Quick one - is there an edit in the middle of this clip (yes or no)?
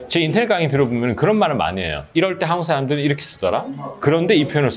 no